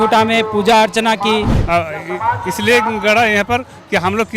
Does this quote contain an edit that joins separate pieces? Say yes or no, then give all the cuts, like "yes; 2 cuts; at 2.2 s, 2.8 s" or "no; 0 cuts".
yes; 1 cut; at 1.6 s